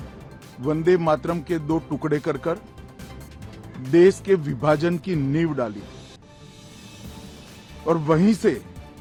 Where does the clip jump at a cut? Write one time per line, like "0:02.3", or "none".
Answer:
none